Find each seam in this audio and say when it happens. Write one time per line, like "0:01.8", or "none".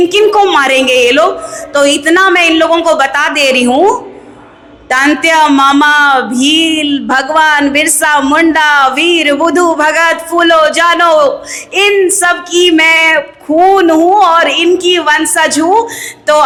none